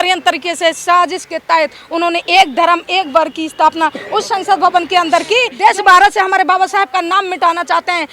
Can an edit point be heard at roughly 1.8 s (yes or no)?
no